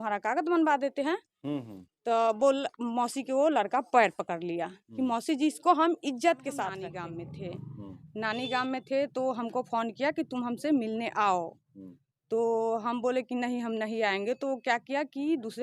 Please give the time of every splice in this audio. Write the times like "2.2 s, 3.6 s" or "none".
6.8 s